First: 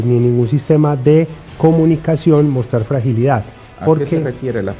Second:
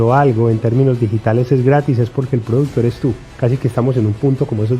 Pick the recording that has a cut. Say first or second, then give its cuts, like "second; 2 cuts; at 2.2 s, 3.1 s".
second; 1 cut; at 3.3 s